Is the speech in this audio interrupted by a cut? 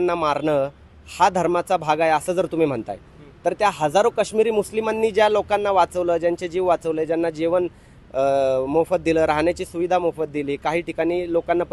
no; 0 cuts

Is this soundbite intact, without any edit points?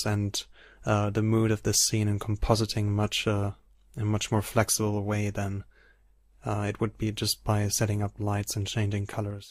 yes; 0 cuts

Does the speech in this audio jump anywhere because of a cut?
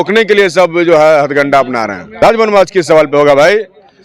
yes; 1 cut; at 2.0 s

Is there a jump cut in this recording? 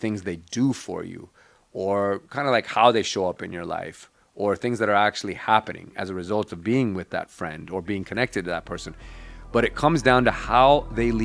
no; 0 cuts

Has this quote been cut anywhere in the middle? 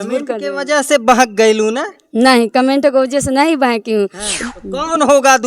yes; 1 cut; at 4.3 s

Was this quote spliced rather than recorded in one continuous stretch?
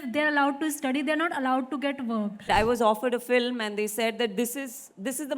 yes; 1 cut; at 2.4 s

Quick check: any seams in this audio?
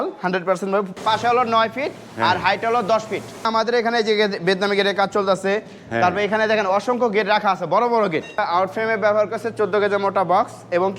yes; 3 cuts; at 1.0 s, 3.5 s, 8.4 s

